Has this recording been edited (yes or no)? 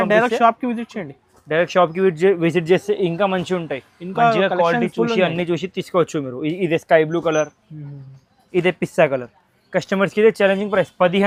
no